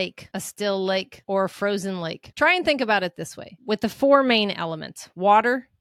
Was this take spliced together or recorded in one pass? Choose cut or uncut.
uncut